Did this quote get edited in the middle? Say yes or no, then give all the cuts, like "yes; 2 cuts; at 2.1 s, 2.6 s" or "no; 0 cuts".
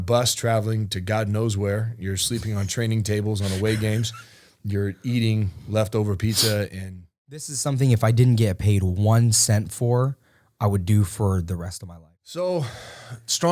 yes; 2 cuts; at 7.5 s, 11.8 s